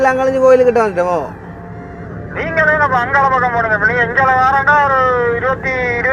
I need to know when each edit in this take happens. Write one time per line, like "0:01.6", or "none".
none